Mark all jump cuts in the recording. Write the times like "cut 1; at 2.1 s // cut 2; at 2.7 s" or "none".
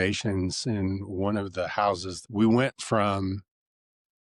cut 1; at 2.1 s